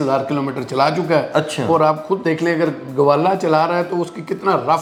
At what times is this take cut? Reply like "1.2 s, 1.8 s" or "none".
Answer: none